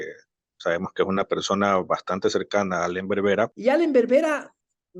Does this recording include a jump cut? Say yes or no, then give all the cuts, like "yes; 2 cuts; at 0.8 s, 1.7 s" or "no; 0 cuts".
yes; 1 cut; at 3.6 s